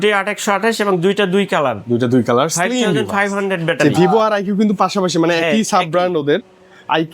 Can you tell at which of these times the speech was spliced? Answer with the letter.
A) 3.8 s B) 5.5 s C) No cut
A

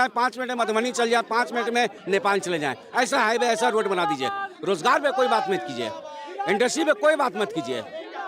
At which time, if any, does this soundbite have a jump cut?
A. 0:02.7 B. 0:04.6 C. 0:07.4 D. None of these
D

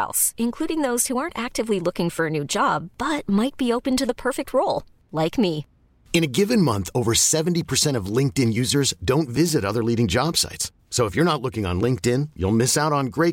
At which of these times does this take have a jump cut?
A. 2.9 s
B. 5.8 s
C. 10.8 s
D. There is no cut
D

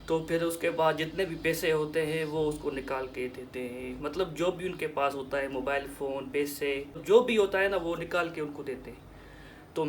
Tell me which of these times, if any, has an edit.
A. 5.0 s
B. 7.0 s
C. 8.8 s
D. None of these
B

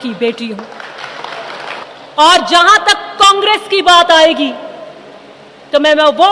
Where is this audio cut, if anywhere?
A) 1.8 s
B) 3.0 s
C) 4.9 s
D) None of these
A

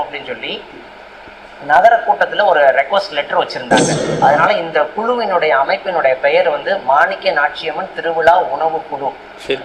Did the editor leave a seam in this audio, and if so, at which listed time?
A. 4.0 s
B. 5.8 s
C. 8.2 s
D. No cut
A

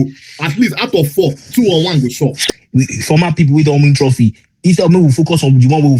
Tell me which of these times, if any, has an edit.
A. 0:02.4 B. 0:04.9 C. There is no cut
A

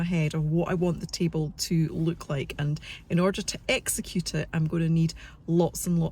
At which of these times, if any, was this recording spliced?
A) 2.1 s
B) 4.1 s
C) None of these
C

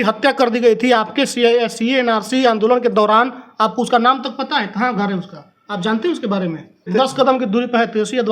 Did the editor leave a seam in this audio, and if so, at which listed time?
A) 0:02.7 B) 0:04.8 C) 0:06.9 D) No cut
C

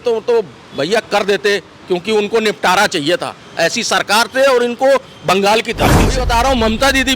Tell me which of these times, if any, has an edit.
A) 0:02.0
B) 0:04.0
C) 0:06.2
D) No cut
C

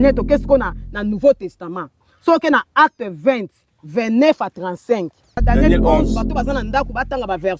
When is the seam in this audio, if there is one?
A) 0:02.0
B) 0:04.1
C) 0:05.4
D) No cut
C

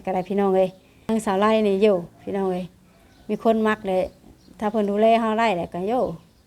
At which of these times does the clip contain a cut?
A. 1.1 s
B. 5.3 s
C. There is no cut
A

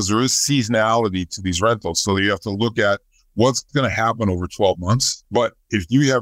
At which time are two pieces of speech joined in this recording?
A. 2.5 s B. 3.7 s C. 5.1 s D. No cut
C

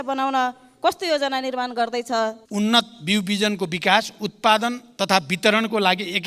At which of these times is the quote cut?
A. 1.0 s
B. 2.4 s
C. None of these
B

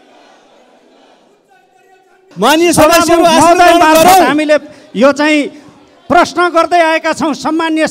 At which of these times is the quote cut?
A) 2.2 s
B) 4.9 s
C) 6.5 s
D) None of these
A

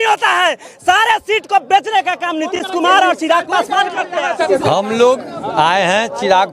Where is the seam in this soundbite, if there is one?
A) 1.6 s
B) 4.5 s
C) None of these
B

